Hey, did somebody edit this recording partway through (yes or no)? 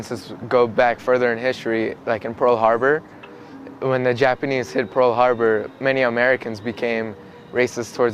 no